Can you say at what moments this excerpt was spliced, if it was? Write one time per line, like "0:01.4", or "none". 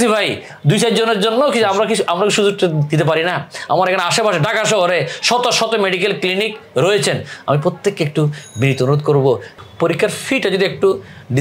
0:09.6